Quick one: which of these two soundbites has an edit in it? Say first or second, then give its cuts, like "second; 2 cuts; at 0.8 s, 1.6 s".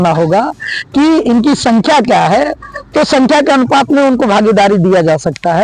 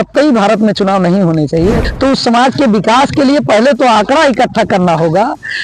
second; 1 cut; at 1.9 s